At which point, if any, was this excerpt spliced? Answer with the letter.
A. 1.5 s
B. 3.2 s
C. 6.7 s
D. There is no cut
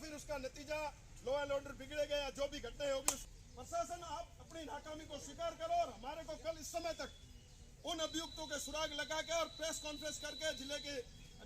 B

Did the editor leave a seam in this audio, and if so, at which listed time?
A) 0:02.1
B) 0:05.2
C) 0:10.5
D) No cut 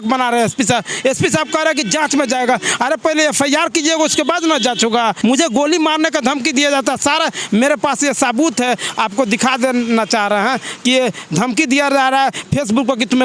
B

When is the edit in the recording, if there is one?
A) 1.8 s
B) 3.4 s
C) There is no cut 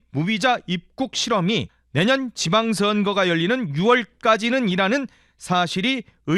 A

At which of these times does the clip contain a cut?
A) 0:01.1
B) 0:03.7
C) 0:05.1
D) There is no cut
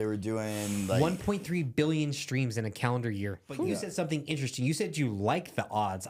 B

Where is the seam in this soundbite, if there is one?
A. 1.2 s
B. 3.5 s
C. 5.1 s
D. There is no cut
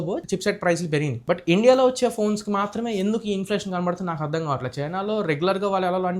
D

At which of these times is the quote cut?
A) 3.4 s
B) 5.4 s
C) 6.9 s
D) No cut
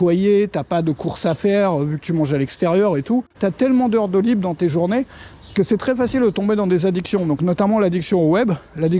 A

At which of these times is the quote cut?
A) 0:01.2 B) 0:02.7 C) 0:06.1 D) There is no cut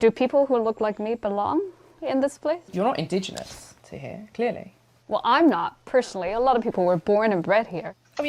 B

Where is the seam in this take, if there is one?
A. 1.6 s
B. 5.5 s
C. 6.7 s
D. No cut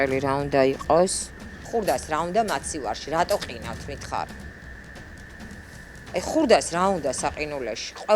A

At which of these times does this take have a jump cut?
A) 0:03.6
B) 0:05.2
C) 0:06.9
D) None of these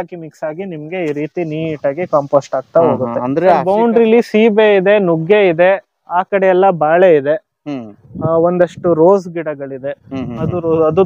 A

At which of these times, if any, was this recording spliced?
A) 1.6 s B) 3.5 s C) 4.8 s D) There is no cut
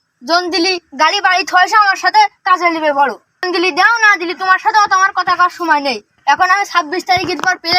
B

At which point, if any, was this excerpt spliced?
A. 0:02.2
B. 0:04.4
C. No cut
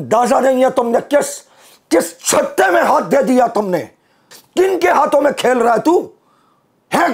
B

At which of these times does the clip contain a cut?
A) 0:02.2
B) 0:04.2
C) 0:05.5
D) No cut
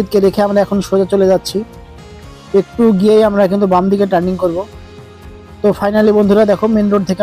D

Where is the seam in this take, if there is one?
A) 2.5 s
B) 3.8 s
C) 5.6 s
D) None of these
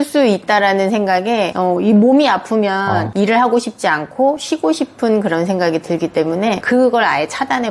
D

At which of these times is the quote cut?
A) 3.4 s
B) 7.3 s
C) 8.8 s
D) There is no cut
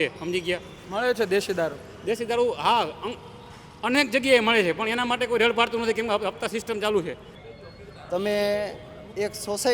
B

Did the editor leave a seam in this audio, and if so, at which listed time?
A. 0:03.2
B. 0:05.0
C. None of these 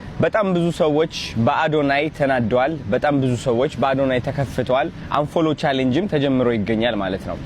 B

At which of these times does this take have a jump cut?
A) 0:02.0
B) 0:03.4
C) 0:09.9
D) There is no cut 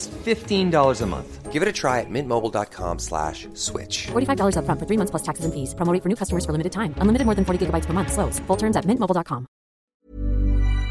C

